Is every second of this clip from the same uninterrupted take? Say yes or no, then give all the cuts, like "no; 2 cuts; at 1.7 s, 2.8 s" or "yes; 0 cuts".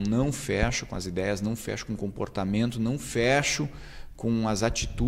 yes; 0 cuts